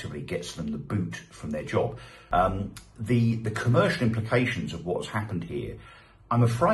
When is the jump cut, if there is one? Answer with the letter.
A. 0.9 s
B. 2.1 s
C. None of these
B